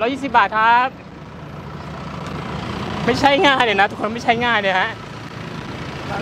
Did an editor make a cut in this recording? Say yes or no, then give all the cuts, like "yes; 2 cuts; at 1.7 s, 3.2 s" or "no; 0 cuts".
no; 0 cuts